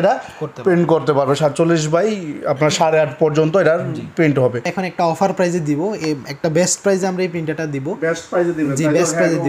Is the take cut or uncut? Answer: cut